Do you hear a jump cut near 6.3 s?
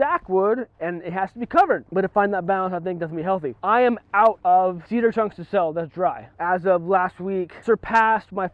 yes; 5 cuts; at 1.9 s, 3.5 s, 4.5 s, 6.3 s, 7.5 s

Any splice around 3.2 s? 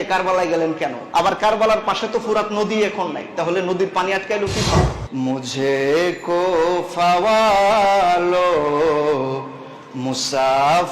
no; 2 cuts; at 1.0 s, 5.0 s

